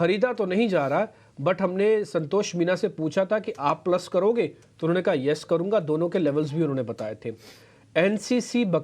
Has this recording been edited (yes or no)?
yes